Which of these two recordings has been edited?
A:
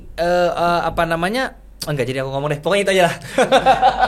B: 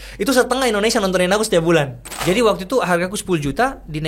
B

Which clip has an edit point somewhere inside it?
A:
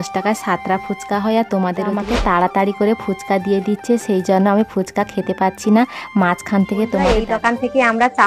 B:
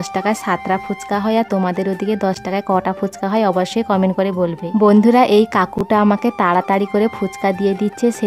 A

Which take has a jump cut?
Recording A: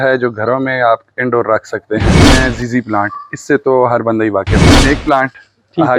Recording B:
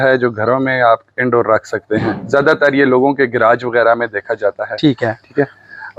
A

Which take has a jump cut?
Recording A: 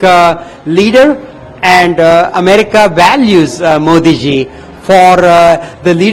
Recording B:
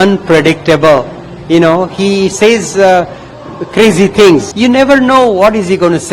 B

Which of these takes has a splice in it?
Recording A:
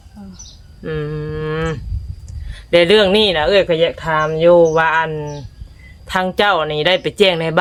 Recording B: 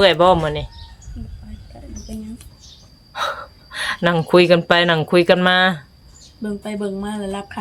B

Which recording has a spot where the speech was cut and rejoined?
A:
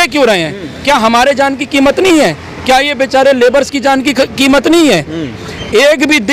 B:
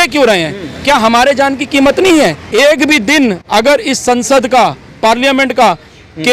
B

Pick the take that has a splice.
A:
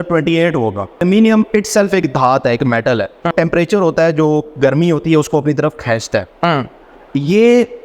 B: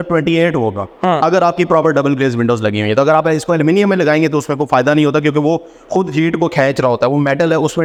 A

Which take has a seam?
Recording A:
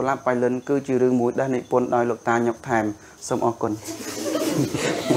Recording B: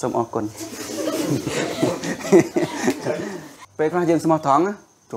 B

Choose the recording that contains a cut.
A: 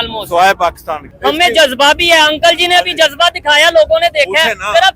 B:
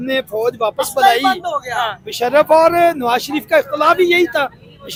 A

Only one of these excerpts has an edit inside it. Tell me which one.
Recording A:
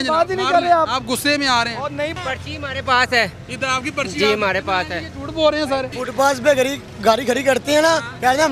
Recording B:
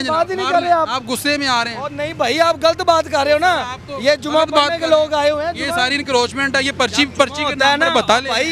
A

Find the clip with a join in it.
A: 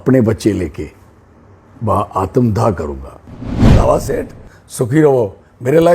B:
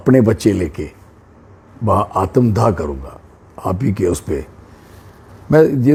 A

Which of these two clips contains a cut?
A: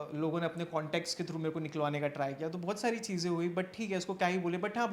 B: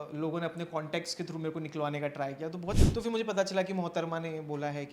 B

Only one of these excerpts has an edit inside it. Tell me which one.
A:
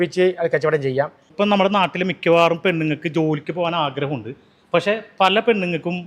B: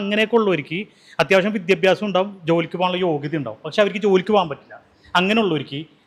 A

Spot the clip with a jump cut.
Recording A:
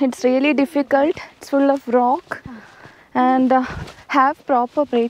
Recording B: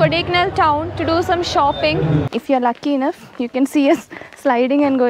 B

